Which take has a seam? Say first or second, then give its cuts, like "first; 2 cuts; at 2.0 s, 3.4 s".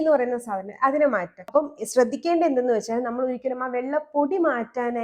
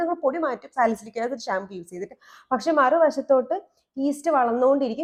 first; 1 cut; at 1.3 s